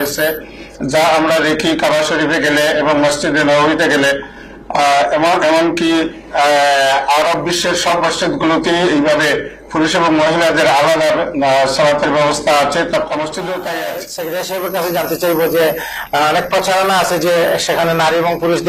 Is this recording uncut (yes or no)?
no